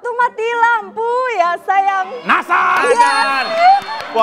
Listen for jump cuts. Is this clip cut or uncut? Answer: uncut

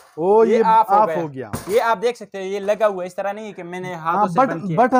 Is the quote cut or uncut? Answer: uncut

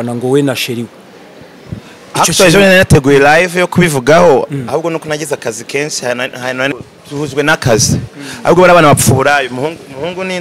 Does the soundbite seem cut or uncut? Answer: cut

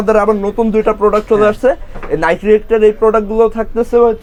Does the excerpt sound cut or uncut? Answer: uncut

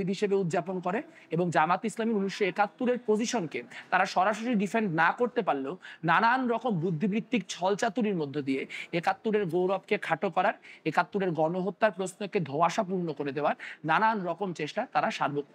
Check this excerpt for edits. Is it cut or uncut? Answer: uncut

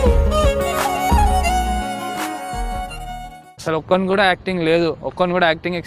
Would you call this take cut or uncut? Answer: uncut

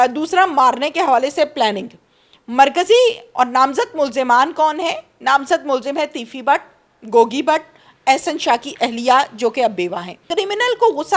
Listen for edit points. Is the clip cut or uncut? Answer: cut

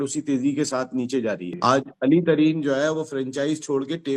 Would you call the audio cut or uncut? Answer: cut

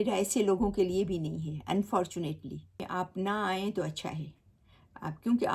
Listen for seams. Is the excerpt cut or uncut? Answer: cut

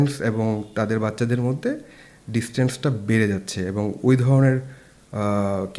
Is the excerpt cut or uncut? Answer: uncut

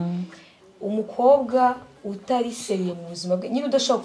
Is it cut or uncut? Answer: uncut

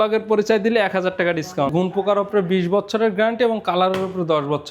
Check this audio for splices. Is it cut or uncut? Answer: cut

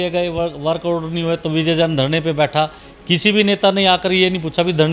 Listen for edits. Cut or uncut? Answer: uncut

